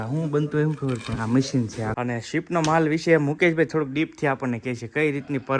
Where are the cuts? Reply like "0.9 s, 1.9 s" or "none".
1.9 s

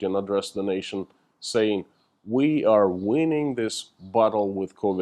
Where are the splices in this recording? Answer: none

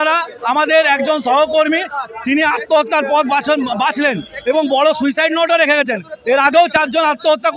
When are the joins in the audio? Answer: none

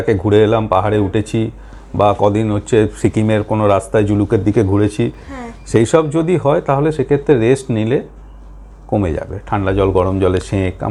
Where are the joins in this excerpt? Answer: none

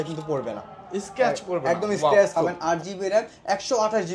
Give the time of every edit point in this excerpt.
2.4 s

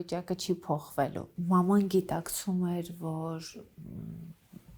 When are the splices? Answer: 1.3 s

